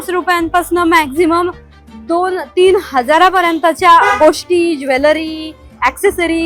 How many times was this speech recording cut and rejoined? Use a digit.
0